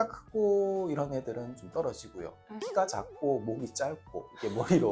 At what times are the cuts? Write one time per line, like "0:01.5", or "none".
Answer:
none

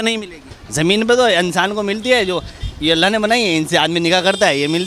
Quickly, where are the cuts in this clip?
none

